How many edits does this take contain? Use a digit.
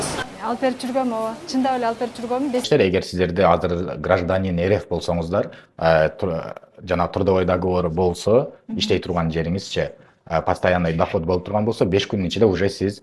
1